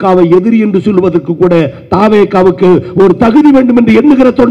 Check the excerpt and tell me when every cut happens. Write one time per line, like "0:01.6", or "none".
none